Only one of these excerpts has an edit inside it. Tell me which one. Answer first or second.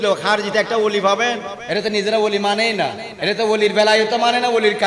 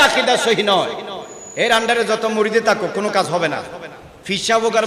first